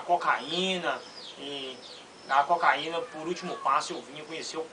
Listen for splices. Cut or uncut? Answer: uncut